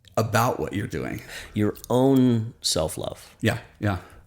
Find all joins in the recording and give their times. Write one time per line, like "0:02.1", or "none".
0:01.3